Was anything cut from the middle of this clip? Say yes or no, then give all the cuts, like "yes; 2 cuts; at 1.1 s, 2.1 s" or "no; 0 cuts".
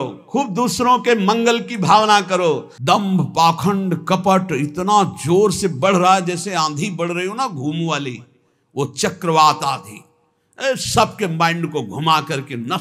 yes; 1 cut; at 2.7 s